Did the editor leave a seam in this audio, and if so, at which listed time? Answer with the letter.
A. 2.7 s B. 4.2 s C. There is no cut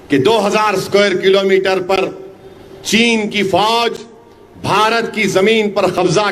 C